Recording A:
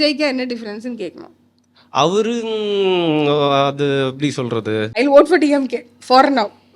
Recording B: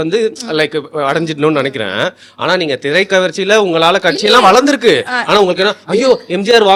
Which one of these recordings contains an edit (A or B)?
A